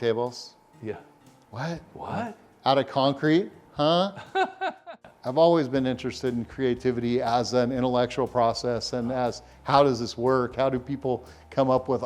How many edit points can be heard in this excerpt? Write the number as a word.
one